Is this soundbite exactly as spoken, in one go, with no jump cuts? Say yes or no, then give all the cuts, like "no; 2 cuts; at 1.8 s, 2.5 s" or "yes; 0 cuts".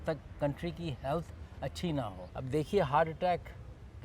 no; 1 cut; at 2.3 s